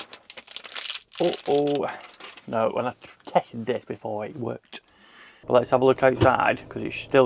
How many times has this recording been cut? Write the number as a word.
one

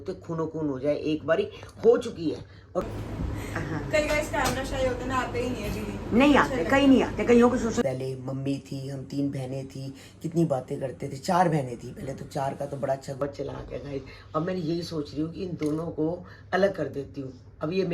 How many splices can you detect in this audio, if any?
three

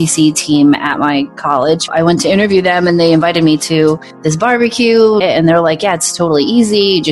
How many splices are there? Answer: two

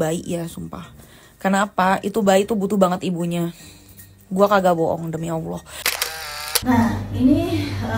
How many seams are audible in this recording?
one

